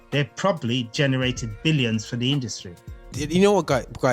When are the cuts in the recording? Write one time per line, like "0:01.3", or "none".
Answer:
0:03.2